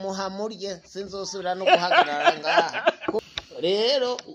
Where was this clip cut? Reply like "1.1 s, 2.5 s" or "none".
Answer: 3.2 s